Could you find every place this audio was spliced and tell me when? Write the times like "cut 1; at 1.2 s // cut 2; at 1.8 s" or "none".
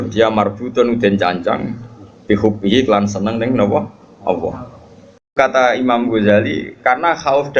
cut 1; at 5.4 s